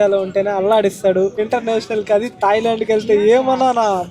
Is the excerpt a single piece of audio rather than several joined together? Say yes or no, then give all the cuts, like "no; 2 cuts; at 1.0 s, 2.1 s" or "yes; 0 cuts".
yes; 0 cuts